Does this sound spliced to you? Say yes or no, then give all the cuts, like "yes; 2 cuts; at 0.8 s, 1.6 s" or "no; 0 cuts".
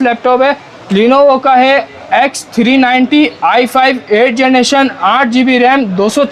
no; 0 cuts